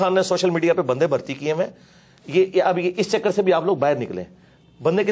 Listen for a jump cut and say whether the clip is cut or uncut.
uncut